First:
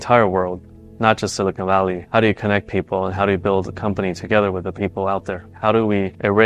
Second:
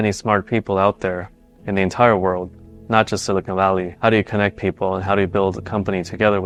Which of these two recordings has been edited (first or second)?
first